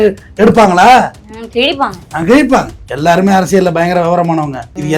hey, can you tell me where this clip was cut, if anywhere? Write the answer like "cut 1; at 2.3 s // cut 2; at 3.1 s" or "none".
cut 1; at 2.8 s